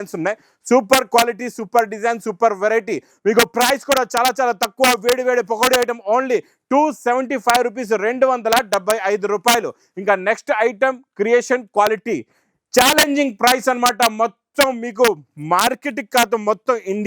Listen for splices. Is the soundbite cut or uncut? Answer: uncut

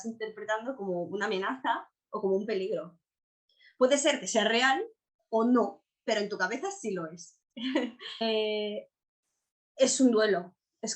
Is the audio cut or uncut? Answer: cut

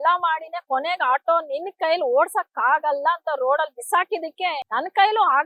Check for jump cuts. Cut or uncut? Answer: cut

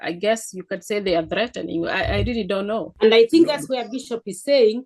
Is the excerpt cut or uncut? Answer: cut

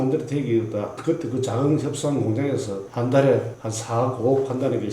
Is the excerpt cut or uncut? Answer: cut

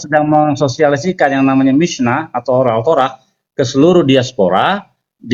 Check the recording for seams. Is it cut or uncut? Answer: uncut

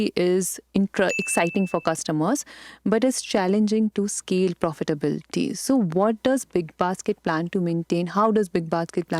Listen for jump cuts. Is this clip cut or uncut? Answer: uncut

